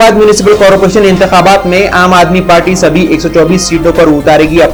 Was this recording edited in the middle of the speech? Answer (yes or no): no